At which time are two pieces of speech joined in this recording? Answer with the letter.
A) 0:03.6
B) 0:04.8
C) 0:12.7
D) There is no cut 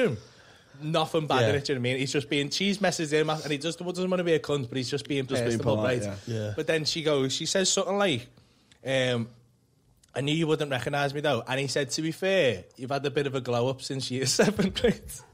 D